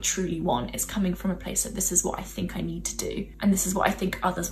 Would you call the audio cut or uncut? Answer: cut